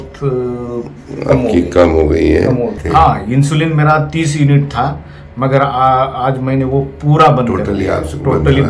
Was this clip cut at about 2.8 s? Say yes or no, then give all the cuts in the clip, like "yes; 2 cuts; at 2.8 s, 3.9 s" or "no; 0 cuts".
yes; 1 cut; at 2.8 s